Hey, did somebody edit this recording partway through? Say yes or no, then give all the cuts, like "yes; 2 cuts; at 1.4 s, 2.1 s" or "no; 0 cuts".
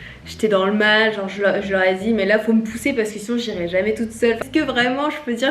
no; 0 cuts